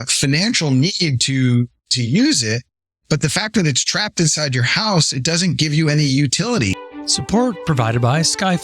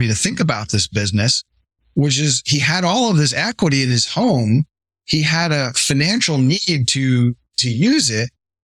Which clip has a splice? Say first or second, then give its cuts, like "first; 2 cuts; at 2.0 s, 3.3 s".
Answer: first; 1 cut; at 6.7 s